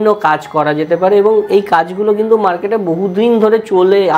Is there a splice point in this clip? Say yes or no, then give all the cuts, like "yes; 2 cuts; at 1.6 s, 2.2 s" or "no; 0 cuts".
no; 0 cuts